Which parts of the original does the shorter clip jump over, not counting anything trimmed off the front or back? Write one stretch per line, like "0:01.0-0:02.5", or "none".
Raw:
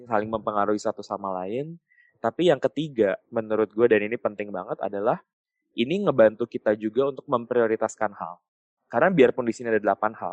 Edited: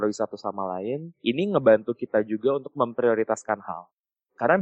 0:01.8-0:05.6